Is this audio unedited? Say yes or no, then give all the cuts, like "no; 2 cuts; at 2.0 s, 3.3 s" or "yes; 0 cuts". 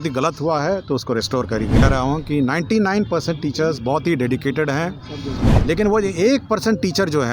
no; 2 cuts; at 1.8 s, 5.4 s